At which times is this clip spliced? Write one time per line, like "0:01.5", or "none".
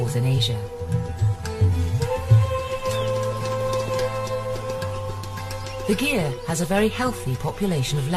0:01.0